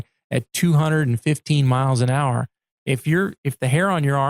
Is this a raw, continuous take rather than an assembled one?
yes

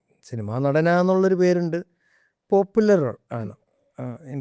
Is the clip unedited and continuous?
yes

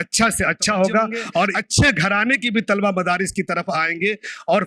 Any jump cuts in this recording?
yes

